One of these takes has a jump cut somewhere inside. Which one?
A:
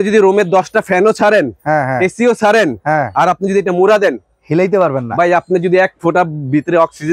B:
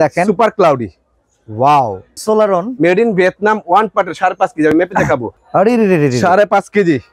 B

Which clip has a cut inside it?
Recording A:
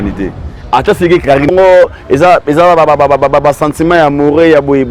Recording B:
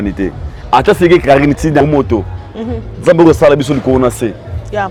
A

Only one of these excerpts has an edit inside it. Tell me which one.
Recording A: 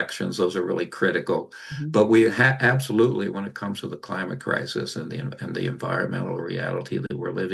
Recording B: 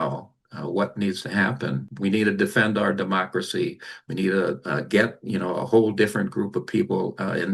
B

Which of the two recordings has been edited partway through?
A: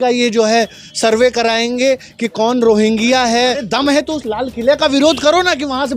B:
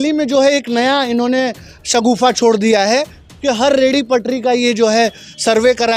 A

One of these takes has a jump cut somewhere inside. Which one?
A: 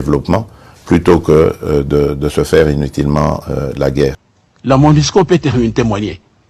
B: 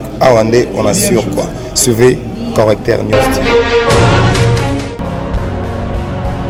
A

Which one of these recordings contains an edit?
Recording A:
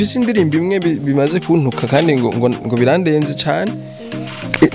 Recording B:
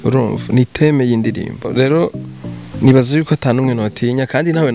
B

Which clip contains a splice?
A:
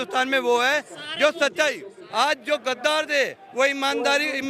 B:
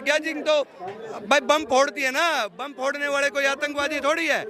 A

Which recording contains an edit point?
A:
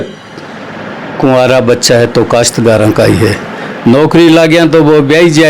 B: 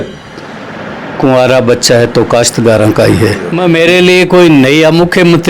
B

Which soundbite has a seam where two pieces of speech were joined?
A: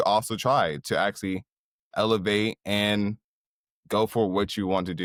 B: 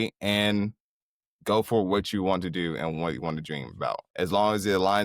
B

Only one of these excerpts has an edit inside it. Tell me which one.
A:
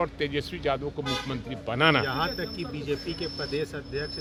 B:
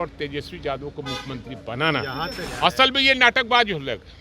B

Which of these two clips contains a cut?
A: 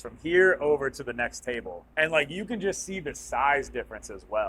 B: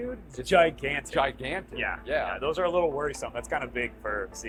A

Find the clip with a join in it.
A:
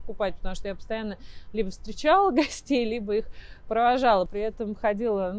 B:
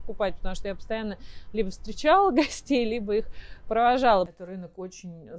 B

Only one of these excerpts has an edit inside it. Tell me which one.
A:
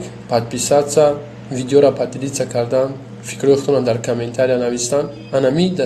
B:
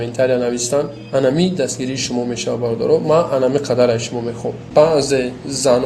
B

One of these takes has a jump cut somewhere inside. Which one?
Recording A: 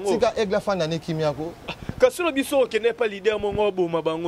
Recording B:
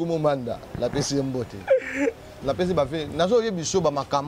B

